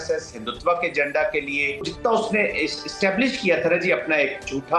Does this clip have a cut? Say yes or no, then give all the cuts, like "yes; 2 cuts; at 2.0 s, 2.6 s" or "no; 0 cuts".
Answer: yes; 1 cut; at 1.9 s